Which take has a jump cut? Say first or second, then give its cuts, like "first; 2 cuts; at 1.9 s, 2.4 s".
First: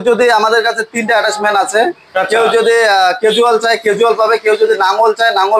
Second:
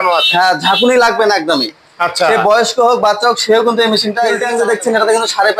second; 1 cut; at 4.4 s